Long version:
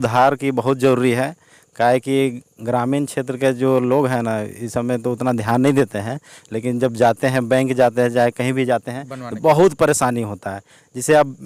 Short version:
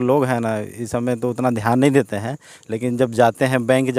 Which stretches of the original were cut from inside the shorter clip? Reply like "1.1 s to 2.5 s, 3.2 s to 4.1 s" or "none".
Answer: none